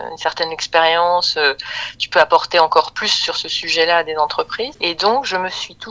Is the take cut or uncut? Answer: cut